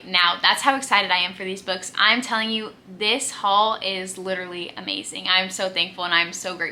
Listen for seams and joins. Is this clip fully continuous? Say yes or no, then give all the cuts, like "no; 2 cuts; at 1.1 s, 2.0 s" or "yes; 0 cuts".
yes; 0 cuts